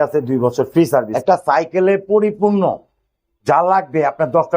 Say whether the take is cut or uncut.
cut